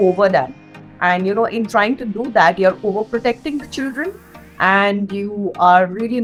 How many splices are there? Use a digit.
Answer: 0